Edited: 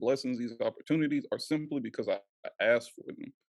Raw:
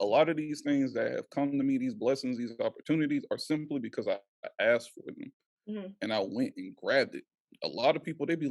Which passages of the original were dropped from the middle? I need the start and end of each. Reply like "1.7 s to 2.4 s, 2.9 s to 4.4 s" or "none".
none